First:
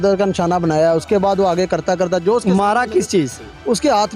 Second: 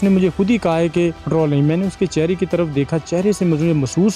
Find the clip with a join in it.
second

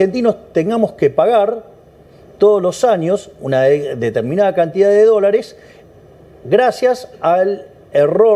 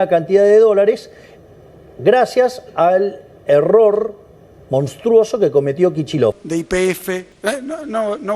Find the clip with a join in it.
second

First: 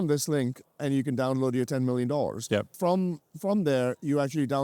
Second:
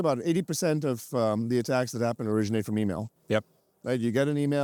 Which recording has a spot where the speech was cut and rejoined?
first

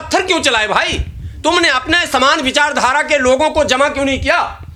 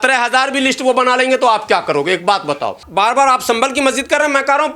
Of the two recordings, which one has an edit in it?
second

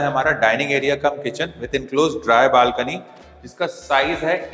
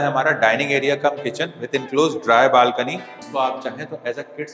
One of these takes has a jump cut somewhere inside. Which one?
second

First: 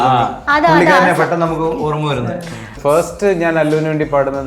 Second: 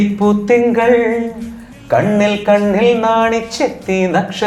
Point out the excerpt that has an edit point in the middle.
first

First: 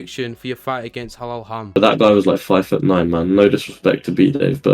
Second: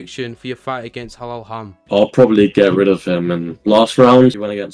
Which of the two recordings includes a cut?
first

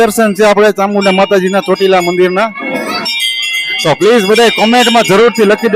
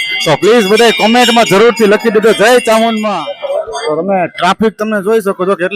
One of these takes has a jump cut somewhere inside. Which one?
second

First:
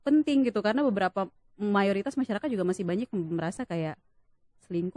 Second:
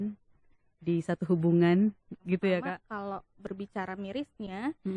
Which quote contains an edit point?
second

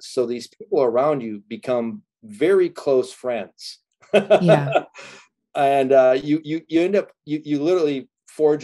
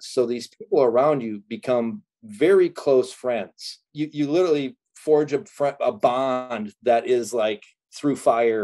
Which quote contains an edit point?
second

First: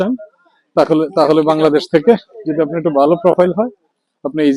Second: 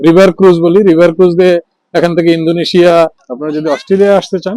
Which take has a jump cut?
second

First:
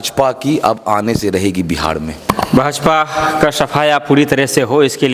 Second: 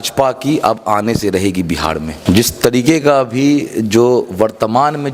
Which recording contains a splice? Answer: second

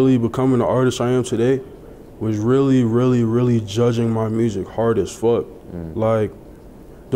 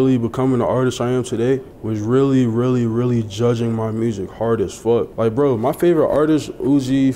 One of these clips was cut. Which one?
second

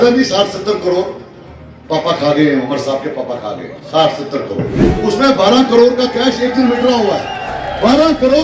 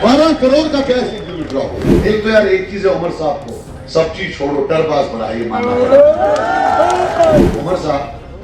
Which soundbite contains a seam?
second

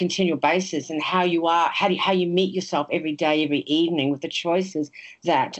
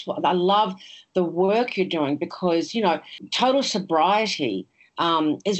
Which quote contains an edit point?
second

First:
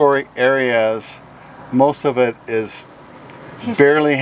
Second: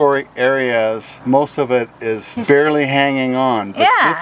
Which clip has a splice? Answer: second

